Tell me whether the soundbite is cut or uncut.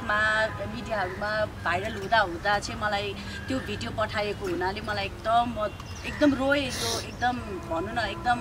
uncut